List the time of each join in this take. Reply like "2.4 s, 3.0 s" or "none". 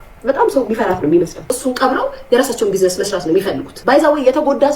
1.5 s, 3.7 s